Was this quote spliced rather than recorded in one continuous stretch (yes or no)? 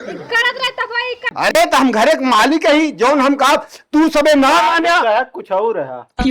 yes